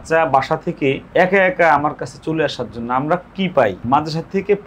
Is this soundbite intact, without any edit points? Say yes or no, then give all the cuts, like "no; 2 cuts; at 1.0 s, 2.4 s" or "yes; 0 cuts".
no; 2 cuts; at 1.0 s, 3.8 s